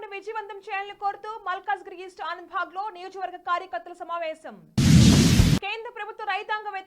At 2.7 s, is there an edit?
no; 2 cuts; at 4.6 s, 5.6 s

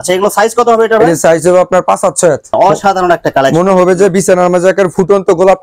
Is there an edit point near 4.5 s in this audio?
no; 1 cut; at 2.5 s

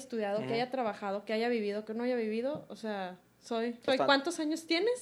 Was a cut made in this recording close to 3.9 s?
yes; 1 cut; at 3.9 s

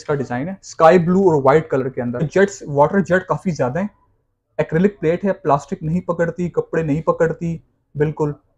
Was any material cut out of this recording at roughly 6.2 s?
no; 1 cut; at 2.3 s

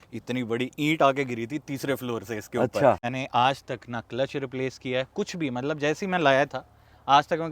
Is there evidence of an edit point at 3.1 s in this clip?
yes; 1 cut; at 3.1 s

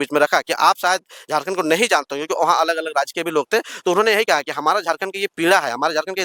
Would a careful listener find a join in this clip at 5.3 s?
no; 0 cuts

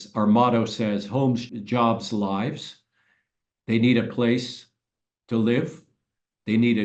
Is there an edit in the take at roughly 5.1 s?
no; 1 cut; at 1.4 s

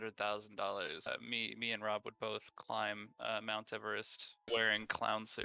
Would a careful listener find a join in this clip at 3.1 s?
no; 1 cut; at 1.1 s

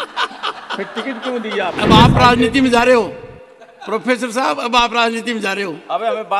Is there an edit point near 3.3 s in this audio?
no; 1 cut; at 1.8 s

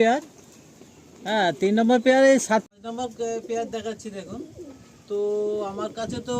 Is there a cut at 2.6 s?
yes; 1 cut; at 2.6 s

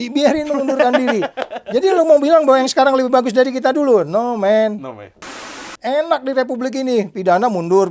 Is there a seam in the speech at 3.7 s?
no; 1 cut; at 5.5 s

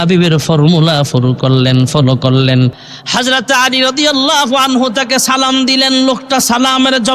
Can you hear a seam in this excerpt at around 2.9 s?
yes; 1 cut; at 2.9 s

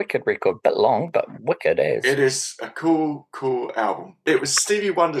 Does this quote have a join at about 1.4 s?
no; 1 cut; at 4.1 s

